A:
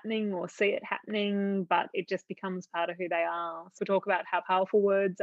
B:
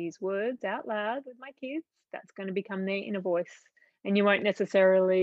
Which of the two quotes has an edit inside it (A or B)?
A